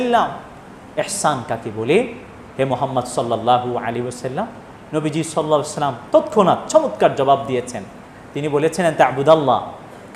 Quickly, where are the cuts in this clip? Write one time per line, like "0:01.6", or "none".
none

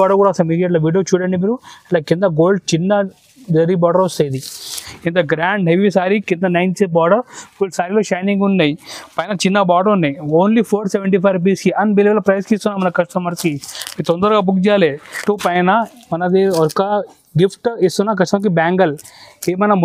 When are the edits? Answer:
0:04.8
0:15.1

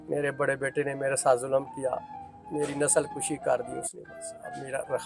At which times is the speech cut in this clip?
none

